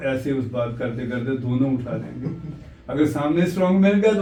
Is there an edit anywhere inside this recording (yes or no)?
no